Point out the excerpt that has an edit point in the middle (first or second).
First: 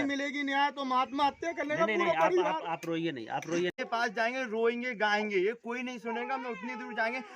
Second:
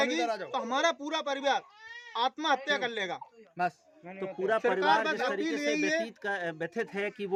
first